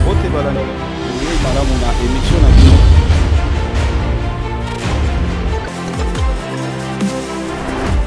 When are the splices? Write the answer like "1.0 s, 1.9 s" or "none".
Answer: none